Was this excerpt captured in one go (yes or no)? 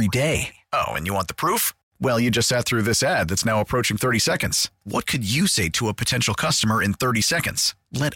yes